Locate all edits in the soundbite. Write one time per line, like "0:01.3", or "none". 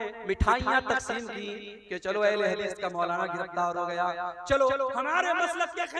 none